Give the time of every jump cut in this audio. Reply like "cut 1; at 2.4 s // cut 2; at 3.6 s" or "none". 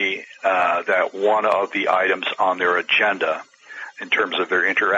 cut 1; at 3.8 s